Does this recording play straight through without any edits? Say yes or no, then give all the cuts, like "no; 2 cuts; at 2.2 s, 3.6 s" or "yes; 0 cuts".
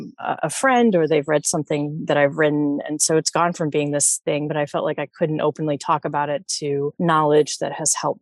no; 2 cuts; at 4.5 s, 6.9 s